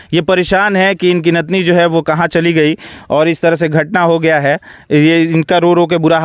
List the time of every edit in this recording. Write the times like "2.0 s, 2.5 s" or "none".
none

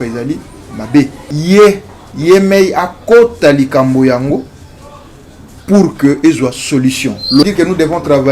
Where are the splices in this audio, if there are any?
1.3 s, 7.4 s

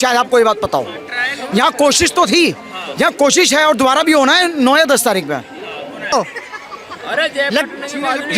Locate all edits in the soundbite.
6.1 s

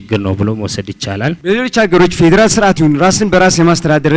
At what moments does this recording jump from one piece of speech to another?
1.4 s

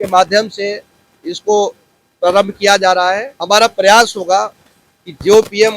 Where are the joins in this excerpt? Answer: 3.3 s

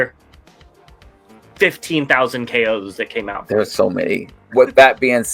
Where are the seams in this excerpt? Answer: 4.4 s

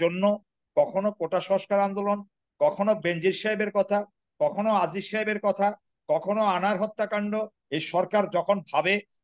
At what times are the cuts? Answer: 7.6 s

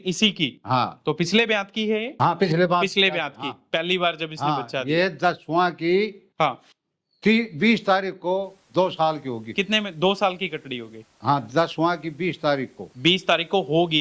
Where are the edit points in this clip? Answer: 2.1 s

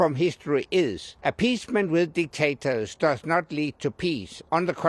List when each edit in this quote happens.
1.1 s

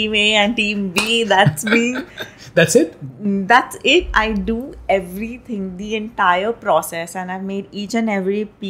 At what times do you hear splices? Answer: none

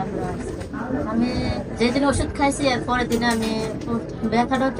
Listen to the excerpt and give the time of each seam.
none

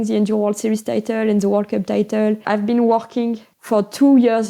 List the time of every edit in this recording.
2.4 s, 3.5 s

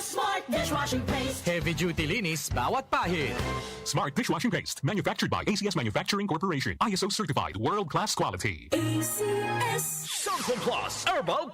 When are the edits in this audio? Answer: 10.0 s

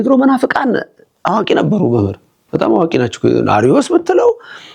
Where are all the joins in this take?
none

